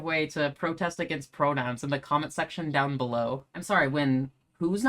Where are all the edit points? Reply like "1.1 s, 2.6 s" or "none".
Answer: 3.5 s